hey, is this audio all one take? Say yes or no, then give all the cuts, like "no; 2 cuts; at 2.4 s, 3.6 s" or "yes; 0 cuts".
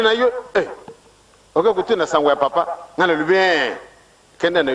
yes; 0 cuts